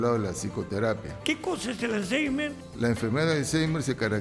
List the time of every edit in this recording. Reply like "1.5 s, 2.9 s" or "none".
1.1 s, 2.6 s

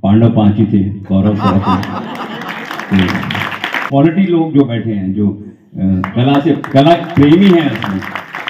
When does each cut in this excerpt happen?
3.8 s

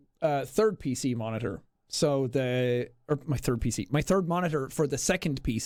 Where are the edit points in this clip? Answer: none

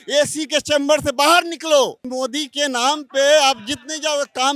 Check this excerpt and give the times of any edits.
2.0 s

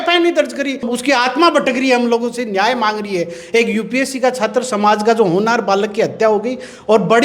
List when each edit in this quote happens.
0.9 s

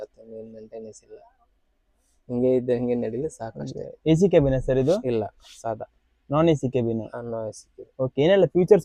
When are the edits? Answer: none

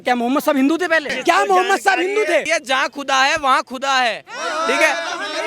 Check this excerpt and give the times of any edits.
1.2 s, 2.5 s

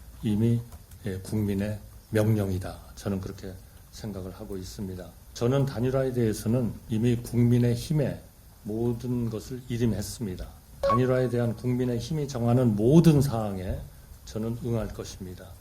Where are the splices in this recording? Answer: 5.2 s, 6.8 s, 10.8 s

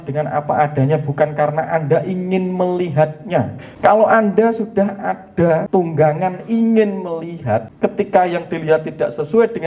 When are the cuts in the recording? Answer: 3.6 s, 5.6 s, 7.7 s

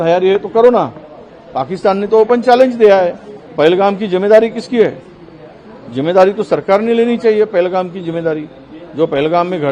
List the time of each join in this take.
3.4 s

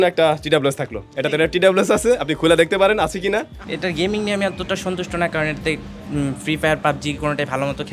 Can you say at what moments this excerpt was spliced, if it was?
3.6 s

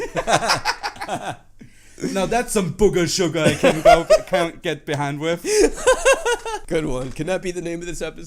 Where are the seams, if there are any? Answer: 6.6 s

